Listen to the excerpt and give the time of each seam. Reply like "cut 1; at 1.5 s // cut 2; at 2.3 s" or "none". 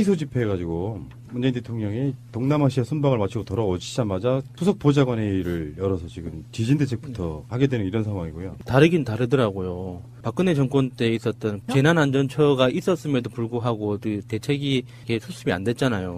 cut 1; at 3.1 s